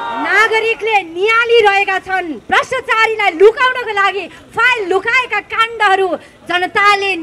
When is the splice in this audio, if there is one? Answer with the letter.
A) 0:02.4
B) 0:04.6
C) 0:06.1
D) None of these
A